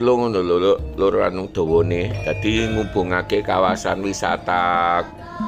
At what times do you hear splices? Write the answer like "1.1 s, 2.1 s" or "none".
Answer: none